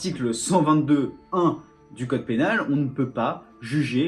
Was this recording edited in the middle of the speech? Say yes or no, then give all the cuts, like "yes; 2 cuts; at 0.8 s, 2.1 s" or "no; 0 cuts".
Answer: no; 0 cuts